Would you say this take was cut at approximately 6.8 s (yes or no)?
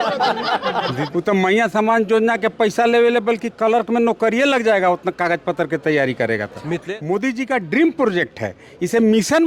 yes